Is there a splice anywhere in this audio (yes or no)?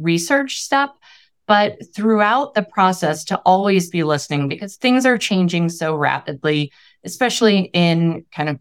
no